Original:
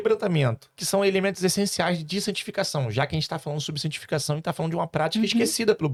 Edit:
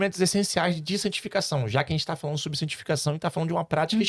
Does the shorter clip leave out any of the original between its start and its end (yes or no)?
no